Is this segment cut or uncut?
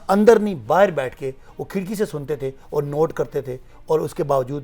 uncut